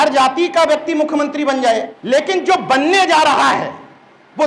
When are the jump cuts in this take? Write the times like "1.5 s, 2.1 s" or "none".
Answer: 1.9 s